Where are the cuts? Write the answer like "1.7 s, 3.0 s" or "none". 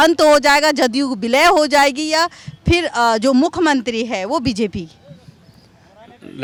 none

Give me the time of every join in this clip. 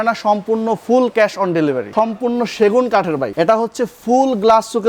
1.9 s, 3.3 s

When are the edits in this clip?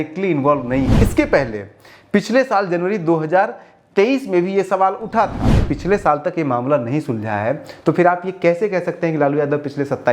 0.9 s, 5.6 s

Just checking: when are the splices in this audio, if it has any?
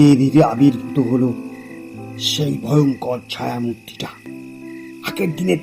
4.7 s

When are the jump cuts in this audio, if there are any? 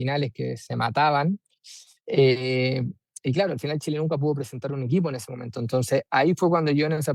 none

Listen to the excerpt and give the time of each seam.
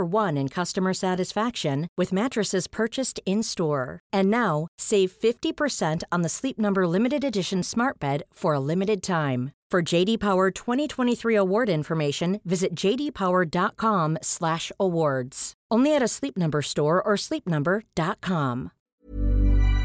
18.9 s

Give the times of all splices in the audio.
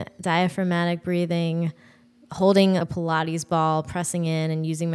2.8 s

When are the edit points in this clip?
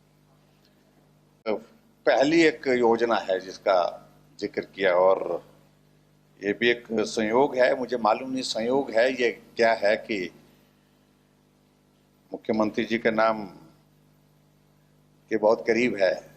1.5 s

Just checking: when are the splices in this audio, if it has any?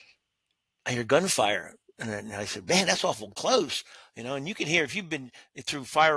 3.3 s

